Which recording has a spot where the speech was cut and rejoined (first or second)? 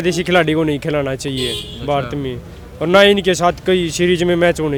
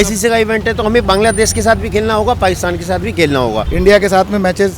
second